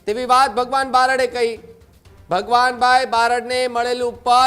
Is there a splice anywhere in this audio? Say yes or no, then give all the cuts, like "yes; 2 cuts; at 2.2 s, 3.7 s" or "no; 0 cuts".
no; 0 cuts